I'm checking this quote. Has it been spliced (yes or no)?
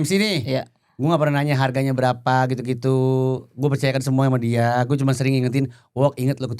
no